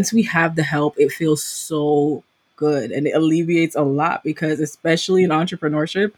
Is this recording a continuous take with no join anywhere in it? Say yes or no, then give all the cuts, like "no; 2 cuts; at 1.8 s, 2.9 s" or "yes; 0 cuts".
yes; 0 cuts